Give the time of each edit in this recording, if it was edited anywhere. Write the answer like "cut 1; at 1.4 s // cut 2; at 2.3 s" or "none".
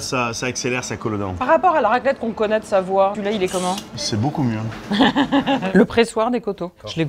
cut 1; at 1.4 s // cut 2; at 3.4 s // cut 3; at 5.7 s